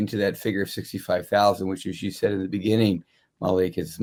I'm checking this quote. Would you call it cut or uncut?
uncut